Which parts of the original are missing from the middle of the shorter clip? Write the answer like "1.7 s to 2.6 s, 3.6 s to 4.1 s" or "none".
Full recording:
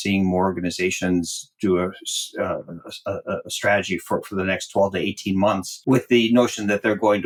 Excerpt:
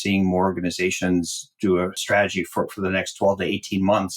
2.0 s to 3.5 s